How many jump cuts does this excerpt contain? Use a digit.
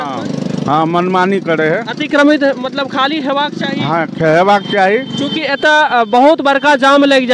0